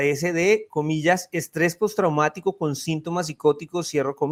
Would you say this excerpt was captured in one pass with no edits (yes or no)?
yes